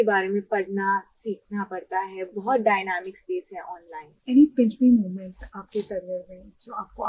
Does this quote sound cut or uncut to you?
cut